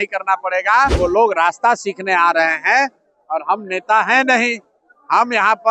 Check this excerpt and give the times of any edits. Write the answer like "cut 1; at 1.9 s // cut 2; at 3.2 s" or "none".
cut 1; at 0.9 s